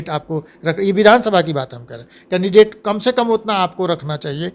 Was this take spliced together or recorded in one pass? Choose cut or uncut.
uncut